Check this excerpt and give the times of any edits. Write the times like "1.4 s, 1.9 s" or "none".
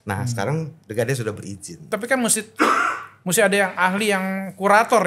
1.8 s